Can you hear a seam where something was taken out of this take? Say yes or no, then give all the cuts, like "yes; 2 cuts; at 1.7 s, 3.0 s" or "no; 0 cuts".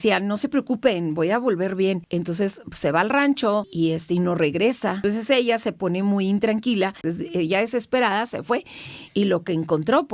yes; 4 cuts; at 2.0 s, 3.7 s, 5.0 s, 7.0 s